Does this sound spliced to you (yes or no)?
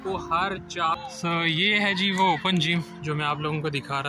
yes